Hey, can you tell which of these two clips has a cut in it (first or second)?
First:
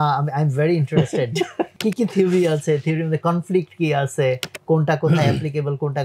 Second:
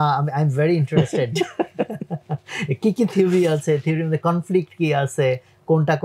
first